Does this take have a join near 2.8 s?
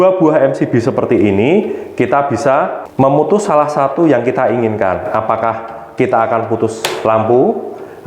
yes; 1 cut; at 2.8 s

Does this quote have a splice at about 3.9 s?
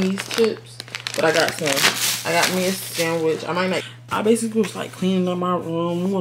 yes; 1 cut; at 3.9 s

